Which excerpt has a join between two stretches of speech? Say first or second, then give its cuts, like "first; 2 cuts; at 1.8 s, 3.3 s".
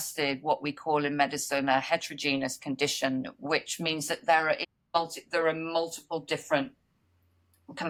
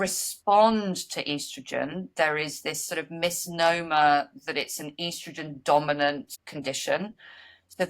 second; 1 cut; at 6.4 s